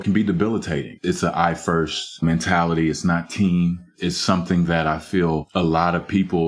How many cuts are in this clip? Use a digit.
0